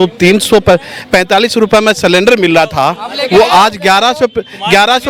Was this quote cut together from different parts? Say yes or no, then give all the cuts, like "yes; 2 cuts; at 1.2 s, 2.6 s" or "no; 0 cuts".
no; 0 cuts